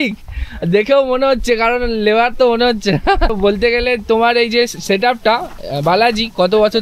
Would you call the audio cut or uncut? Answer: uncut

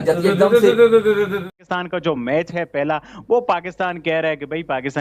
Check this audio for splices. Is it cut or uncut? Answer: cut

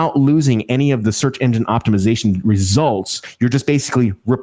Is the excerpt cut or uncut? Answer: cut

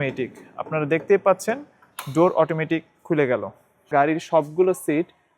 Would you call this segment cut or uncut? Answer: cut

